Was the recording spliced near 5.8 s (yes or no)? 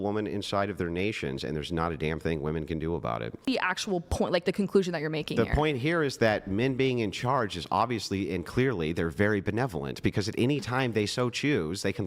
no